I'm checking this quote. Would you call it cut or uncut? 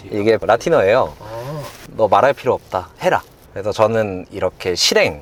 uncut